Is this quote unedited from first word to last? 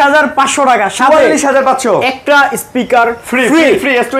yes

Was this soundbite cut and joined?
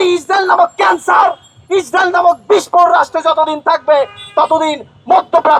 no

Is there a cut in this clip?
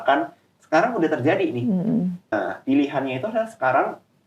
yes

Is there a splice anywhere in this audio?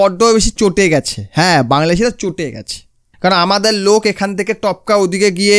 yes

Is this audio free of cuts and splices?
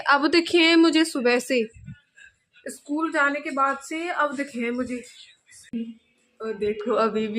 no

